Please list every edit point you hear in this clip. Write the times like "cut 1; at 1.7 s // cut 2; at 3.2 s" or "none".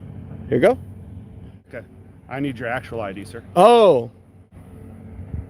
cut 1; at 1.6 s // cut 2; at 4.5 s